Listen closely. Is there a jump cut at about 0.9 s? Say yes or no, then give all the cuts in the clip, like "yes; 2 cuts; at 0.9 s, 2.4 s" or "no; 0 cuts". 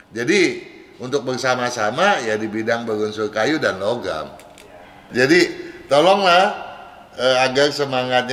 no; 1 cut; at 4.9 s